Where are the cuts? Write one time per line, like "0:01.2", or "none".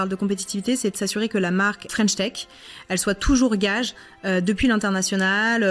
0:01.9